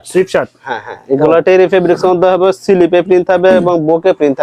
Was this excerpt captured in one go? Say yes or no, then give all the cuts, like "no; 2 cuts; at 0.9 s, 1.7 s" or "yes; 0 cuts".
yes; 0 cuts